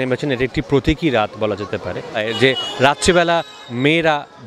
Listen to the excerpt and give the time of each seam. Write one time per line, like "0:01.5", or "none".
0:02.2

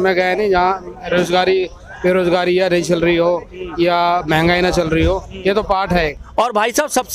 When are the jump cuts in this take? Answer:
0:06.2

